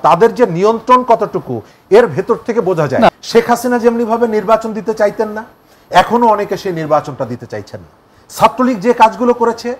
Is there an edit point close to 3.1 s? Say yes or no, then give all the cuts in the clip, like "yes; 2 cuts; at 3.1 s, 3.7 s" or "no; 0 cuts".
yes; 1 cut; at 3.1 s